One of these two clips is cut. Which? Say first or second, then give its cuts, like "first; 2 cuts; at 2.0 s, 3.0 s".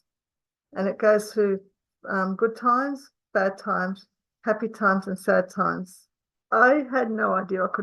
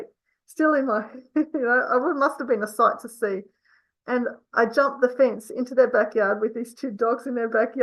first; 1 cut; at 6.5 s